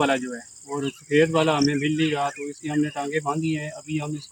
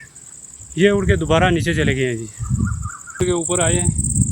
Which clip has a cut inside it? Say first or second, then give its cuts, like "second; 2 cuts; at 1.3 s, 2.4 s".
second; 1 cut; at 3.2 s